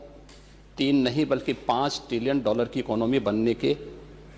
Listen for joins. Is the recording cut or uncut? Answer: uncut